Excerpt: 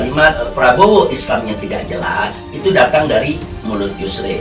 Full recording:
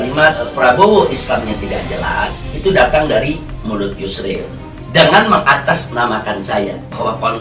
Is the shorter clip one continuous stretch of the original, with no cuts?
yes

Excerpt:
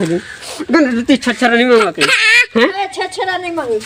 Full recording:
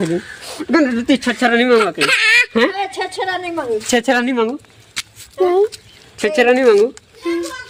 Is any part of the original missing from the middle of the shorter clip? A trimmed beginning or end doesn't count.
no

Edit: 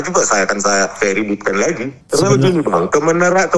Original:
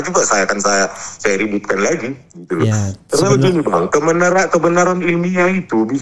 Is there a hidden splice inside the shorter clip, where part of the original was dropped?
yes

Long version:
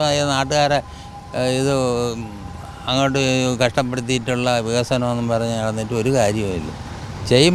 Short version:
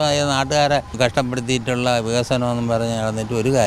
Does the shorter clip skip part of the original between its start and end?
yes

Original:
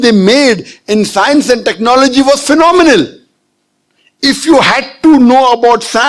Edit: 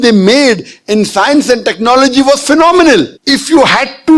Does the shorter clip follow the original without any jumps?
no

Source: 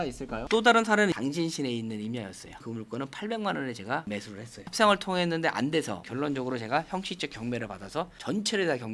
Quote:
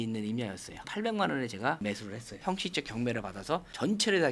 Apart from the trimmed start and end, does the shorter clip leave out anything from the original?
yes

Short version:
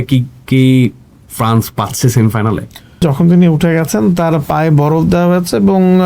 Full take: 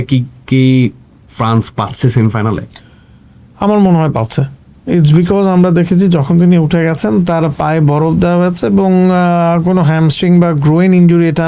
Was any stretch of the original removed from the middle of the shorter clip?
yes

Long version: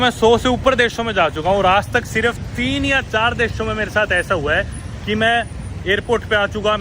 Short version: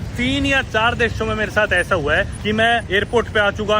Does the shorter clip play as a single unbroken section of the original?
no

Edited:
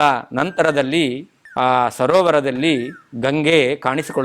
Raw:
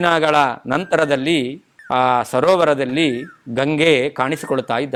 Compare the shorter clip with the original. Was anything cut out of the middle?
no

